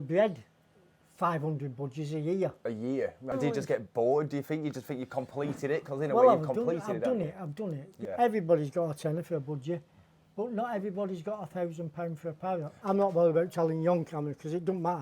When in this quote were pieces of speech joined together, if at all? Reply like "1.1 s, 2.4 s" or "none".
3.3 s, 7.9 s, 12.8 s